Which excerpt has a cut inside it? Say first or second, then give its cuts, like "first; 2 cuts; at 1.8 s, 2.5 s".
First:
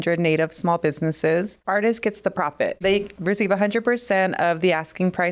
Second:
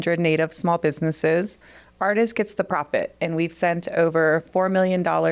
first; 2 cuts; at 1.6 s, 2.8 s